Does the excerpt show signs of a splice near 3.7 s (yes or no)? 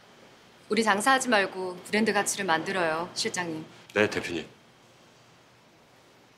yes